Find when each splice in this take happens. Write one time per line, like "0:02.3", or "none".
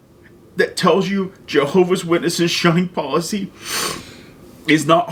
none